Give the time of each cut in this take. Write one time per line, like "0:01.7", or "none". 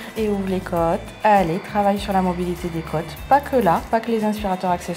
none